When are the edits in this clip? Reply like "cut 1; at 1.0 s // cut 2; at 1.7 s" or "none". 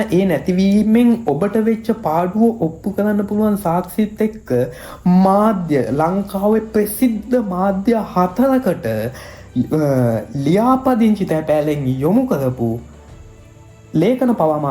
none